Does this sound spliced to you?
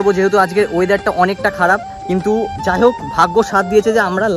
no; 0 cuts

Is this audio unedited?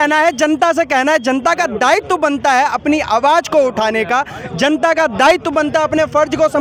yes; 0 cuts

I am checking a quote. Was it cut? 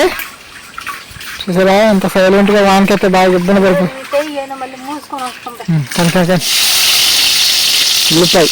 yes; 1 cut; at 6.6 s

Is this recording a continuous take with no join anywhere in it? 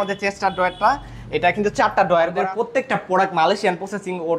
no; 1 cut; at 2.4 s

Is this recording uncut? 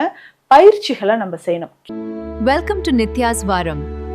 no; 1 cut; at 1.7 s

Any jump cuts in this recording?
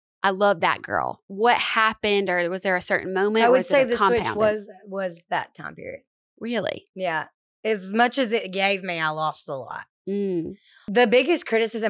yes; 2 cuts; at 1.2 s, 10.8 s

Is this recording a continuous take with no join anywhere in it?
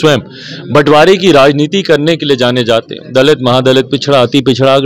yes; 0 cuts

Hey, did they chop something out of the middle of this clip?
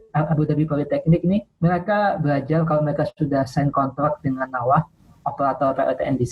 yes; 1 cut; at 1.5 s

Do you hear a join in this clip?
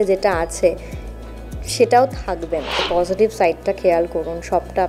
yes; 1 cut; at 2.8 s

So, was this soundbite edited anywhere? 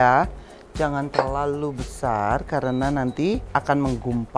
yes; 1 cut; at 3.4 s

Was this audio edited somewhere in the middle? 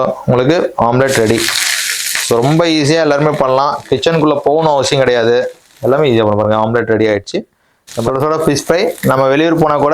yes; 1 cut; at 8.1 s

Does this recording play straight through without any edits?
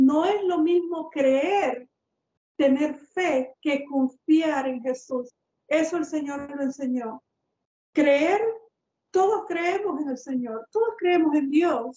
yes; 0 cuts

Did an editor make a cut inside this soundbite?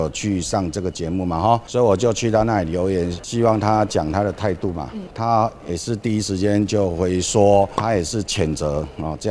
yes; 4 cuts; at 1.7 s, 3.2 s, 5.1 s, 7.8 s

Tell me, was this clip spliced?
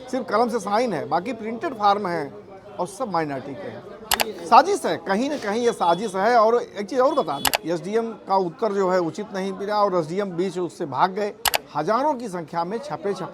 yes; 3 cuts; at 4.1 s, 7.5 s, 11.6 s

